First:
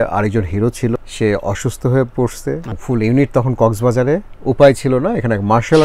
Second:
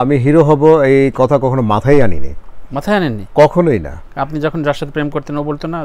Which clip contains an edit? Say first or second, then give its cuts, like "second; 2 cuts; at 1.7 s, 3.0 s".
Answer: first; 3 cuts; at 1.0 s, 2.8 s, 4.3 s